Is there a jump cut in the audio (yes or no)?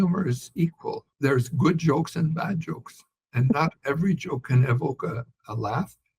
yes